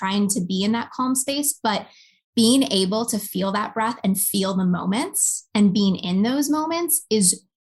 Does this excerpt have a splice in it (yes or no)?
no